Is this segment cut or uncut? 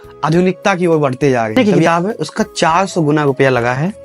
cut